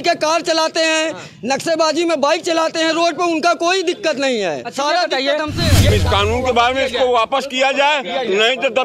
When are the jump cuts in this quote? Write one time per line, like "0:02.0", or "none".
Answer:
0:05.9